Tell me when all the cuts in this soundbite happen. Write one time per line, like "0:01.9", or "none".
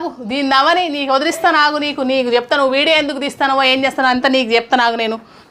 none